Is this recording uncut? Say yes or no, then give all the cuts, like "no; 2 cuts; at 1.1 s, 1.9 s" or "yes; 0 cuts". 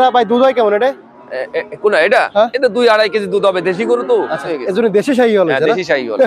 no; 1 cut; at 4.5 s